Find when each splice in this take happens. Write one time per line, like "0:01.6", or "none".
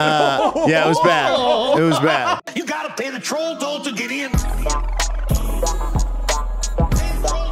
0:02.4